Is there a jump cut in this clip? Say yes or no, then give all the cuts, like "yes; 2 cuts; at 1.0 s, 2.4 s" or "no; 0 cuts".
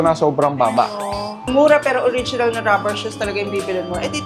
yes; 1 cut; at 1.4 s